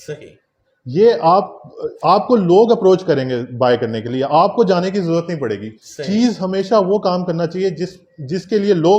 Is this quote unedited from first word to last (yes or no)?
yes